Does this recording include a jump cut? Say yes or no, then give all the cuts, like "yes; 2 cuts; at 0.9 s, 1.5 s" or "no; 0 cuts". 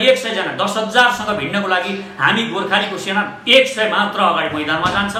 no; 0 cuts